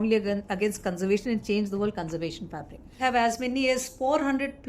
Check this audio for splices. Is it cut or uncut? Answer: cut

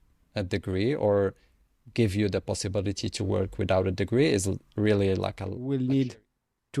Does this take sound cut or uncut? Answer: cut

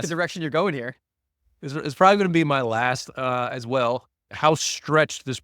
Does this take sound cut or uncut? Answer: cut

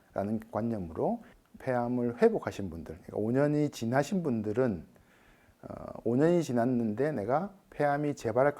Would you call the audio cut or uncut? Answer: cut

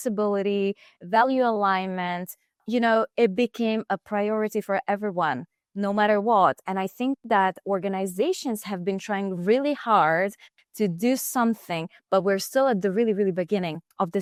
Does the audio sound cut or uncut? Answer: uncut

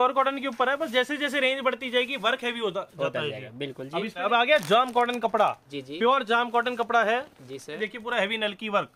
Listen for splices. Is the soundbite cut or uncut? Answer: cut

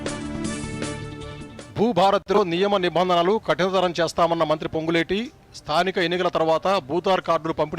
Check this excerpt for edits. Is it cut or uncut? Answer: cut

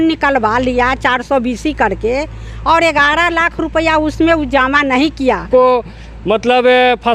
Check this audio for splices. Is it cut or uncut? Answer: cut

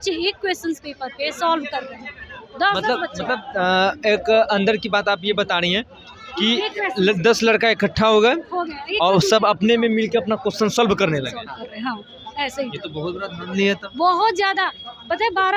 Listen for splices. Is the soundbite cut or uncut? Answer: uncut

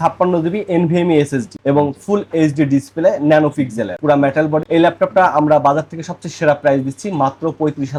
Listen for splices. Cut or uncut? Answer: uncut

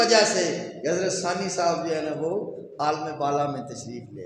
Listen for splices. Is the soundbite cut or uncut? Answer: uncut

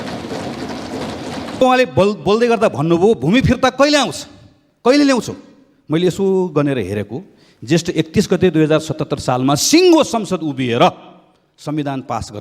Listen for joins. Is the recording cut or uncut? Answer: cut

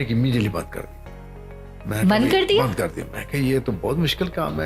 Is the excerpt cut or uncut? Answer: uncut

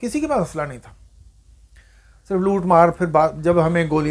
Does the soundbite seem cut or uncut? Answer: uncut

